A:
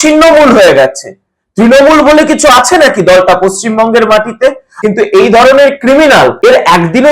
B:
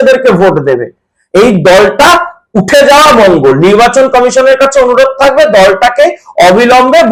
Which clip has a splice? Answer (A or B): A